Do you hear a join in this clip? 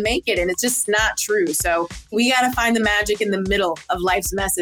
yes; 2 cuts; at 0.8 s, 2.1 s

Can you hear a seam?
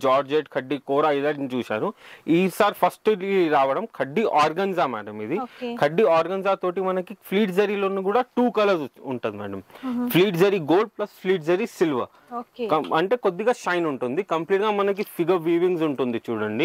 no; 0 cuts

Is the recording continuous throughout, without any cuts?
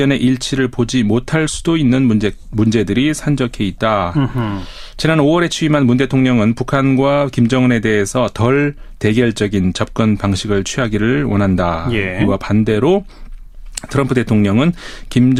yes; 0 cuts

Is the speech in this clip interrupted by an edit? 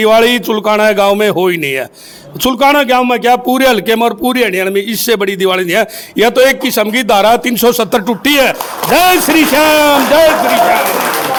no; 0 cuts

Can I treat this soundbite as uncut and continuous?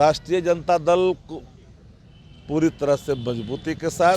yes; 0 cuts

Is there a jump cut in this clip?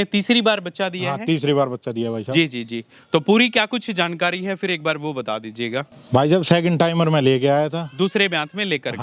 yes; 1 cut; at 6.0 s

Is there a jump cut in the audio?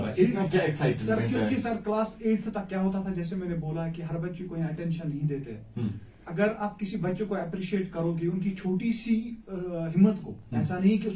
no; 0 cuts

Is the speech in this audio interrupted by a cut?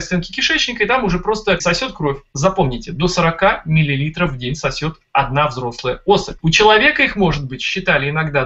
yes; 1 cut; at 1.6 s

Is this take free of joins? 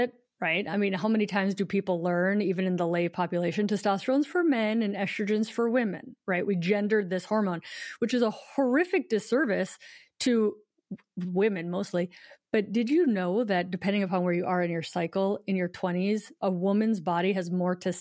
yes; 0 cuts

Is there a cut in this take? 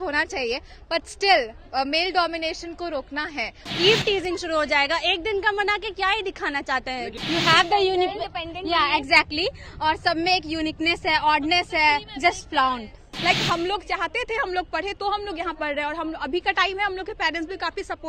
yes; 3 cuts; at 3.6 s, 7.1 s, 13.0 s

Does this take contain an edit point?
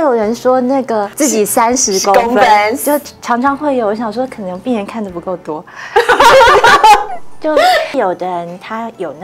yes; 2 cuts; at 1.1 s, 7.9 s

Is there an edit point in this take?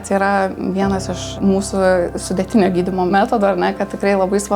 yes; 2 cuts; at 1.3 s, 3.1 s

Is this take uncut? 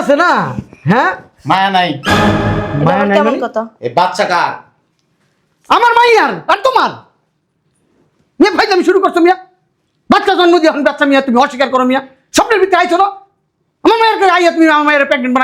no; 1 cut; at 3.8 s

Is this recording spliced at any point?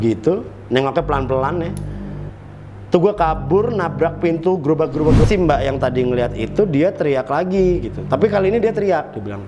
yes; 1 cut; at 5.3 s

